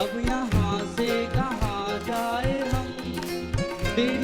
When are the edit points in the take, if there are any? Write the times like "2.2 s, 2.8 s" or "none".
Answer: none

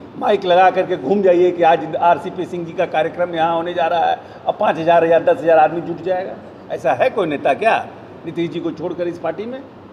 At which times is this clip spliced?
none

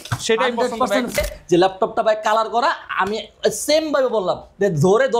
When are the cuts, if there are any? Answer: 1.2 s

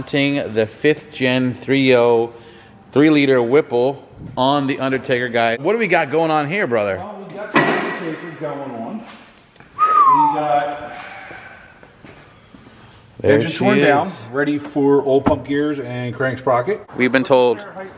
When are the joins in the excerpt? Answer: 5.6 s, 16.9 s

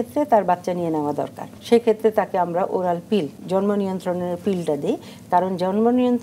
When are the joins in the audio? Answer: 1.5 s, 3.4 s

